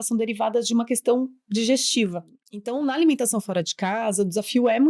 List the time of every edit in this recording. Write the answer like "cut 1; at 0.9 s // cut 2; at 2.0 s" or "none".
cut 1; at 2.6 s